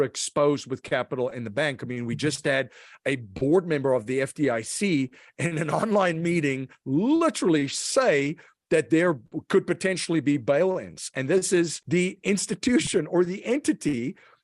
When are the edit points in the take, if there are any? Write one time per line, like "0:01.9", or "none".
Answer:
0:11.8